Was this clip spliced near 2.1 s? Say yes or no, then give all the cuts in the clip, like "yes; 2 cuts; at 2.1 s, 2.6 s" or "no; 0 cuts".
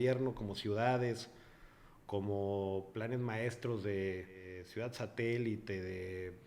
no; 1 cut; at 4.6 s